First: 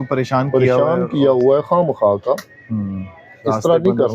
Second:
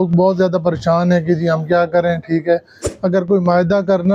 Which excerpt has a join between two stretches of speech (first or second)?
second